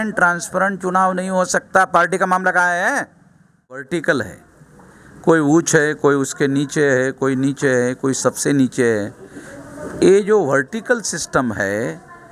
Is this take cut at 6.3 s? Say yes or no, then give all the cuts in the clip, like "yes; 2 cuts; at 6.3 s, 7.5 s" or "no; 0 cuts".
no; 1 cut; at 3.9 s